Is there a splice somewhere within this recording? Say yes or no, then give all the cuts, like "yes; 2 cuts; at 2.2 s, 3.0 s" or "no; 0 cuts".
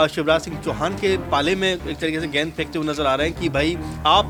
no; 0 cuts